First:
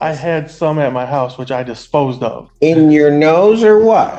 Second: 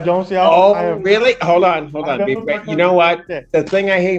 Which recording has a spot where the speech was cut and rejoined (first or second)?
first